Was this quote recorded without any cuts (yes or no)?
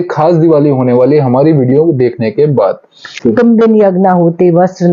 no